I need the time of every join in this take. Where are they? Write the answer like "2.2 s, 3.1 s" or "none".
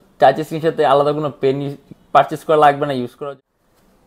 3.2 s